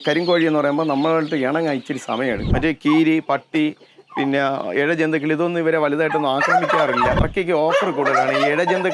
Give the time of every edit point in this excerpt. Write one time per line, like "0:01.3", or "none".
0:02.5
0:07.2